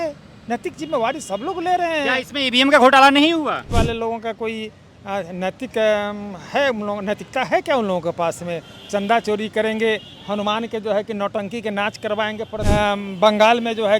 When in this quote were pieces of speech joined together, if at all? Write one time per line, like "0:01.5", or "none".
0:03.7
0:12.6